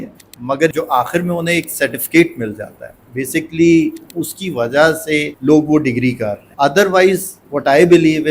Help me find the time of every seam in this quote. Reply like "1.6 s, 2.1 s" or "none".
0.7 s, 5.3 s, 6.4 s, 7.4 s

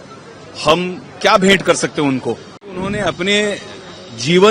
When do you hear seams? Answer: 2.8 s

